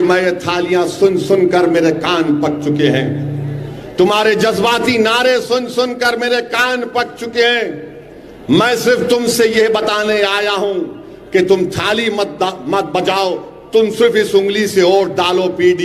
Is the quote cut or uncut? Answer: uncut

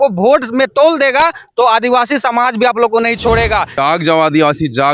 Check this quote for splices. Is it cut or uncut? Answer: cut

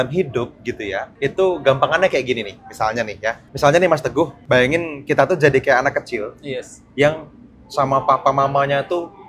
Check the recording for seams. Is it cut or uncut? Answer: cut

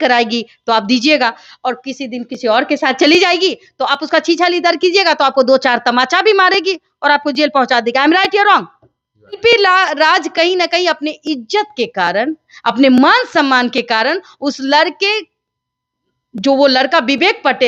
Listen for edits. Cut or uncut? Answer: uncut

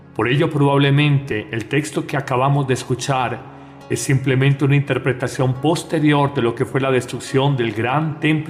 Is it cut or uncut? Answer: uncut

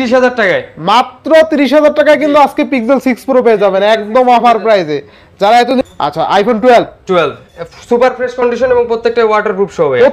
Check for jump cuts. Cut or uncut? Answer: cut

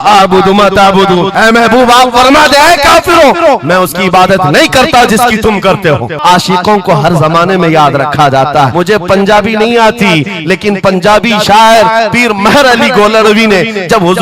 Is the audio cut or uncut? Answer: cut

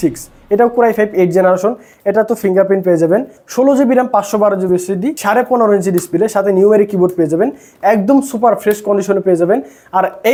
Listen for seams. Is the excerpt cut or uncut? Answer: uncut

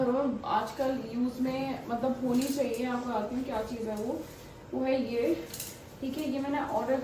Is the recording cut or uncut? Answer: uncut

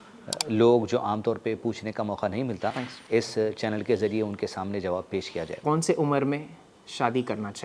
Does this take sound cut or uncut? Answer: cut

